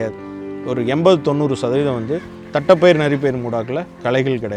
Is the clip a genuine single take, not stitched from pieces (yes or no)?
yes